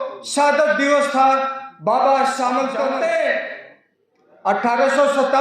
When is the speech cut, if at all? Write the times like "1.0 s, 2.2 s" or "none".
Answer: 2.9 s